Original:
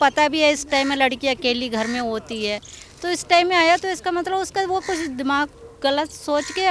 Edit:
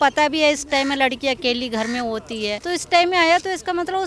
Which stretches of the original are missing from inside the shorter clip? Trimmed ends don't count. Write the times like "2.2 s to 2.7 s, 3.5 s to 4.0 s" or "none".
2.6 s to 3.0 s